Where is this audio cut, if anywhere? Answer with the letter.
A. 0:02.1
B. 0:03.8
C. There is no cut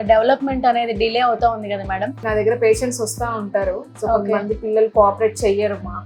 A